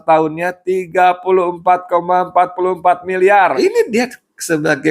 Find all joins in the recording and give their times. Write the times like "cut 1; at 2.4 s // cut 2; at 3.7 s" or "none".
cut 1; at 3.5 s